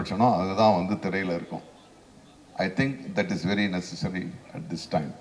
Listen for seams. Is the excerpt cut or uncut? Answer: uncut